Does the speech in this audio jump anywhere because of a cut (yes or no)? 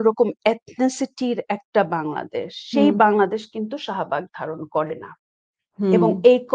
no